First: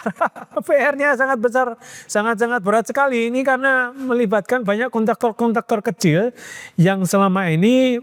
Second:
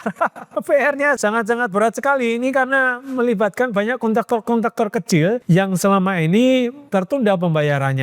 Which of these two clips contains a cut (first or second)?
second